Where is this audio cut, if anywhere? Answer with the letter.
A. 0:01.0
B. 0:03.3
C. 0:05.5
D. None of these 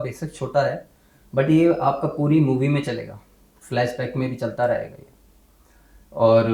D